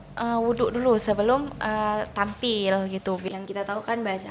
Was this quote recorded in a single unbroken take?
no; 1 cut; at 3.2 s

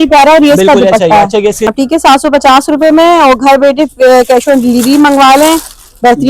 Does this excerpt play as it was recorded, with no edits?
no; 1 cut; at 1.7 s

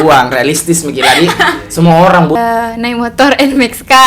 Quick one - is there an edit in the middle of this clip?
yes; 1 cut; at 2.4 s

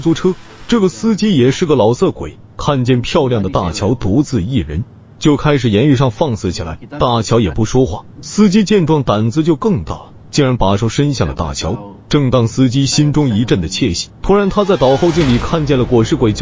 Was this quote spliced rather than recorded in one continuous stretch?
no; 0 cuts

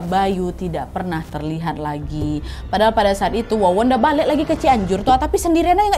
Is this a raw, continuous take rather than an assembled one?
yes; 0 cuts

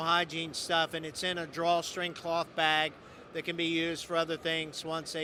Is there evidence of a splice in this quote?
no; 0 cuts

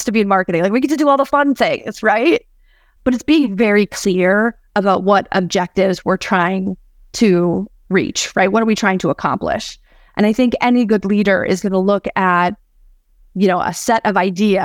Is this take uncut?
yes; 0 cuts

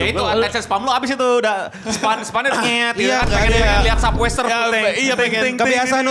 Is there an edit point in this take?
no; 0 cuts

